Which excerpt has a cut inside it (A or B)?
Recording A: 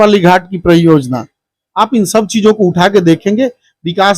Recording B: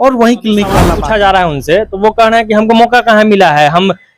B